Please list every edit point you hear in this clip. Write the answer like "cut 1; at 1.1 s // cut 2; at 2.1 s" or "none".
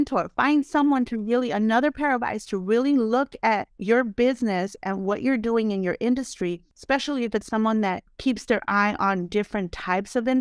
cut 1; at 3.7 s // cut 2; at 6.7 s // cut 3; at 8.1 s